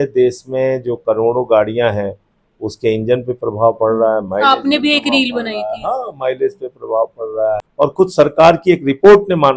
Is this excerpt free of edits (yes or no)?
no